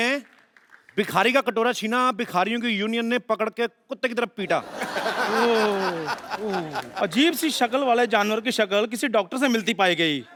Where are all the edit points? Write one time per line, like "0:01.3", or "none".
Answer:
none

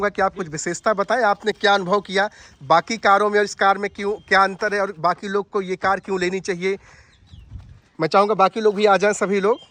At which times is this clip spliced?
none

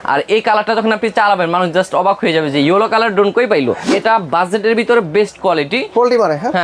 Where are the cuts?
0:03.8

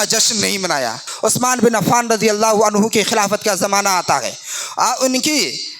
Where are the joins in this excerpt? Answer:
0:01.0

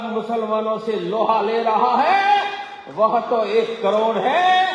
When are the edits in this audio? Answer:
none

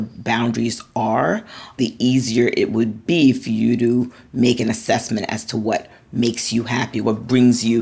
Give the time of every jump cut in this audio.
0:01.8
0:03.0
0:07.0

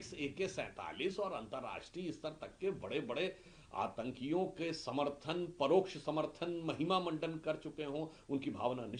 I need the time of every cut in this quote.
none

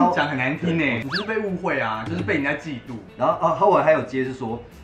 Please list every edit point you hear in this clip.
0:01.0
0:03.0

